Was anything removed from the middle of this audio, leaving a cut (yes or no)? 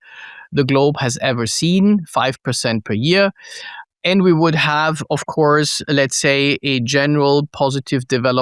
no